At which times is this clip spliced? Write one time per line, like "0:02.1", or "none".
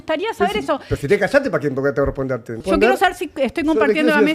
0:02.6

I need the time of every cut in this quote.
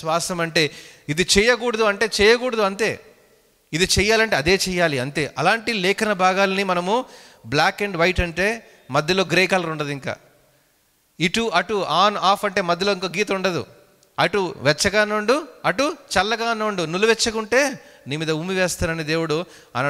none

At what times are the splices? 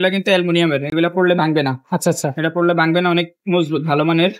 none

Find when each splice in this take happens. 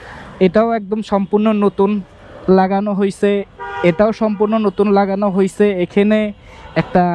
none

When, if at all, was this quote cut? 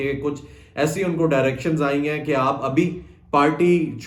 none

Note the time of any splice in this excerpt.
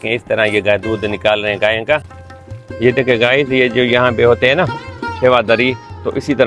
0:02.1

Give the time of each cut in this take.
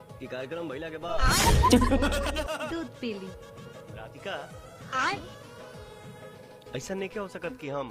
0:02.3

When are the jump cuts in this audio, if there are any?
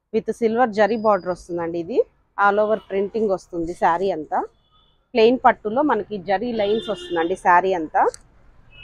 0:05.0

